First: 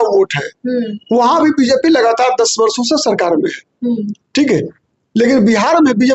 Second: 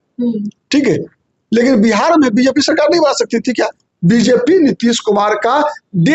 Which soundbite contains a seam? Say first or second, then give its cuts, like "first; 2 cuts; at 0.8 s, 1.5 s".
second; 1 cut; at 3.8 s